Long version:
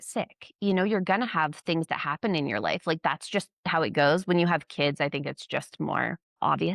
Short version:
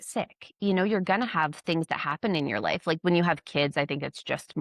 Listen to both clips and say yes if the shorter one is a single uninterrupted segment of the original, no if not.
no